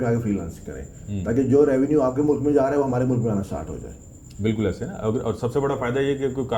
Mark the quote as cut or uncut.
uncut